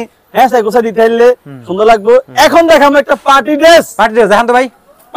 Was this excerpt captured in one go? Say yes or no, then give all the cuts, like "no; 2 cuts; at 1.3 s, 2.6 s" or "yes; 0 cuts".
yes; 0 cuts